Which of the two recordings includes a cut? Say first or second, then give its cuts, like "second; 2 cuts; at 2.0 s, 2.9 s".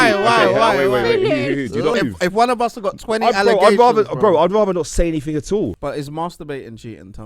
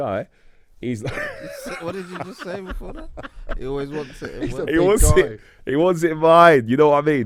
first; 2 cuts; at 1.9 s, 5.8 s